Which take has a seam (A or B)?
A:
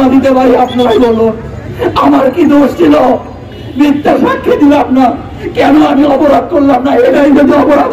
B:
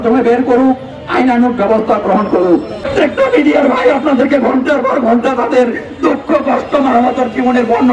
B